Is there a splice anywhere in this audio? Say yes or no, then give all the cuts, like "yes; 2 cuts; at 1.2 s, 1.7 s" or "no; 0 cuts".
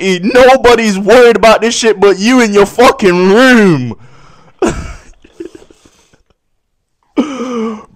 no; 0 cuts